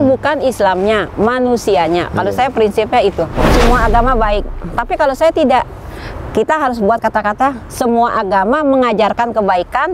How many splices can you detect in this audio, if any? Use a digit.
1